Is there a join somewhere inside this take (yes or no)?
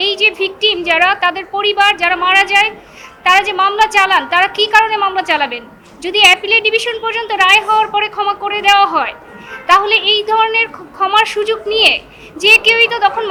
no